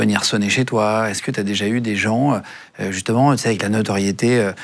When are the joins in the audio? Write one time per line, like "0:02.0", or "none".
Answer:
none